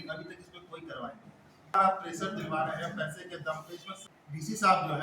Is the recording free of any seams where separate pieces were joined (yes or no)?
no